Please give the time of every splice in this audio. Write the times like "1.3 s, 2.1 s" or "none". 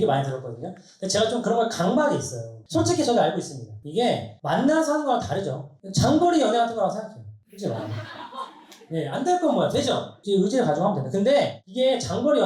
2.5 s